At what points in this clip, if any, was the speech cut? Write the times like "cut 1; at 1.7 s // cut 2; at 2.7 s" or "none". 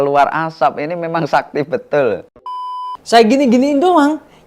cut 1; at 2.6 s